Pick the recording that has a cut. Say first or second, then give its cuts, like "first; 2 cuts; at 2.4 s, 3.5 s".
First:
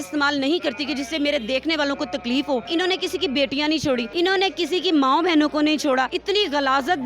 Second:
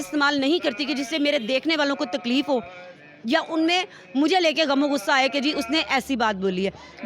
first; 3 cuts; at 2.7 s, 4.1 s, 6.2 s